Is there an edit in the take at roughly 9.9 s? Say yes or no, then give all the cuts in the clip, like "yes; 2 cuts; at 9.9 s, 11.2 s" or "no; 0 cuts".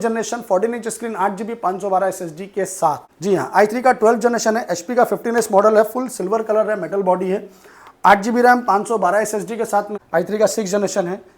yes; 2 cuts; at 3.1 s, 9.9 s